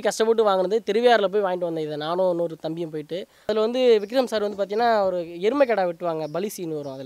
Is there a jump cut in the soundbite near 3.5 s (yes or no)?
yes